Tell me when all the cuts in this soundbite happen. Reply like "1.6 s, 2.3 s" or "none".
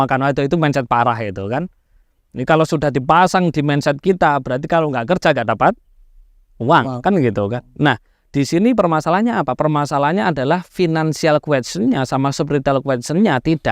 none